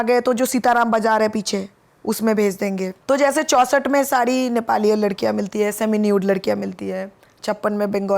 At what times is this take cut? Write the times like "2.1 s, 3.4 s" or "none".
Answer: 2.9 s